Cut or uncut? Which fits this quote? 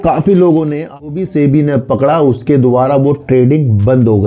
cut